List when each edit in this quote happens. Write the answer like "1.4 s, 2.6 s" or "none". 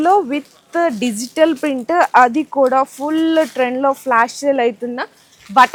none